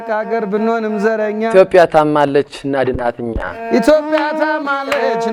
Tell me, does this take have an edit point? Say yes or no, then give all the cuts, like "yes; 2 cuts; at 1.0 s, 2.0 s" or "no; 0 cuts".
no; 0 cuts